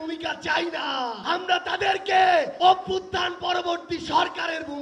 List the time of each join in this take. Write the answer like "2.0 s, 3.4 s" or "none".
1.2 s, 2.5 s